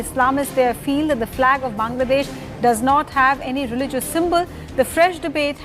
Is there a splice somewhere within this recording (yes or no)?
no